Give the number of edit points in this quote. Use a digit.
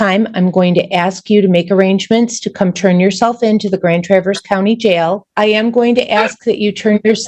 1